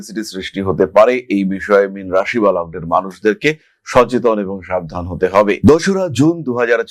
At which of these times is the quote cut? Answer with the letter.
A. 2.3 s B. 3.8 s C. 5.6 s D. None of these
D